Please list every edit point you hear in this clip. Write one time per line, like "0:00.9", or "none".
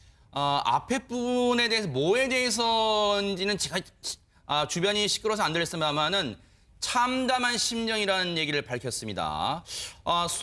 0:05.2